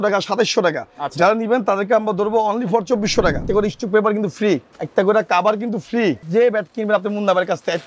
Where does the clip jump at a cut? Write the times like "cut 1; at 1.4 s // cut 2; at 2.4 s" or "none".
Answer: cut 1; at 3.4 s // cut 2; at 4.8 s // cut 3; at 6.3 s